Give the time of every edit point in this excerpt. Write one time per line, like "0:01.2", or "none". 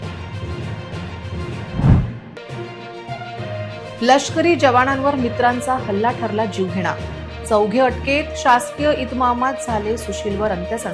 0:02.0